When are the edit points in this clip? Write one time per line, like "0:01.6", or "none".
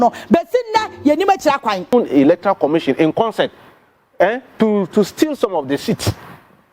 0:01.9